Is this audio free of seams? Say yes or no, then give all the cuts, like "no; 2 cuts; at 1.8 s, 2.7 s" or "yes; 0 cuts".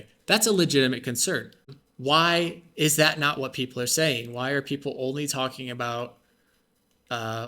no; 1 cut; at 1.6 s